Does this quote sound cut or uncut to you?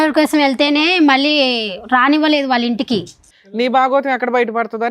cut